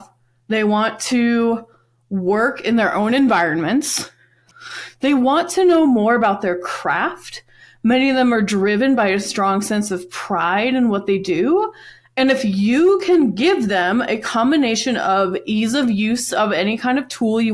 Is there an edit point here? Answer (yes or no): yes